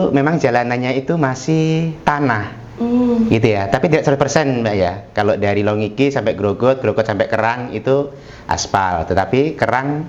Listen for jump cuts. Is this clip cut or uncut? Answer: uncut